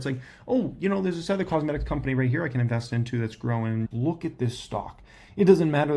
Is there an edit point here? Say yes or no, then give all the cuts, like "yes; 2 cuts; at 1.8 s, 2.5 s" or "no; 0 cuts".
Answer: yes; 1 cut; at 3.9 s